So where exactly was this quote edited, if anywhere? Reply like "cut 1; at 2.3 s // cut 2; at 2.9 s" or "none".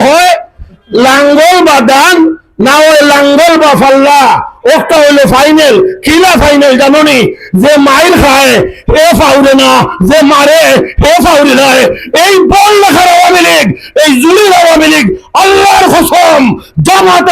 none